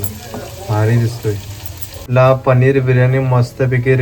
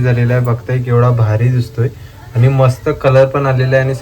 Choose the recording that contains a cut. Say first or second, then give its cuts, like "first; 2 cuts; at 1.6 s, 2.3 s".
first; 1 cut; at 2.1 s